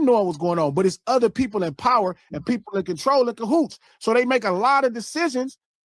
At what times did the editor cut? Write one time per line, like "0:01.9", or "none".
none